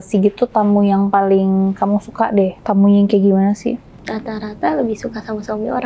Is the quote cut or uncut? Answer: cut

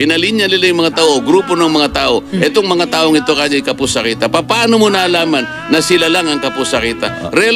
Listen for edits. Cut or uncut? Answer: uncut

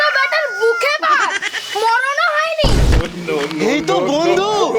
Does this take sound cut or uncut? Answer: cut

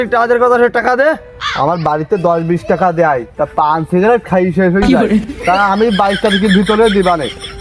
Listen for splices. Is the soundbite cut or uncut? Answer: uncut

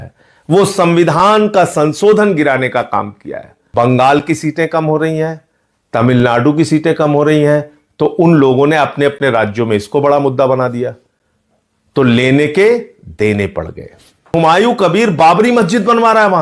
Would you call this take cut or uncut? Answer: cut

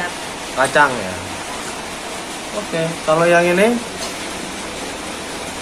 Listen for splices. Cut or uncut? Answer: uncut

